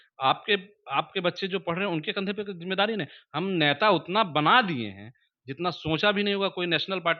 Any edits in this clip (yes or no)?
no